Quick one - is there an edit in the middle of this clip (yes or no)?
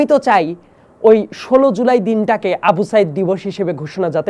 no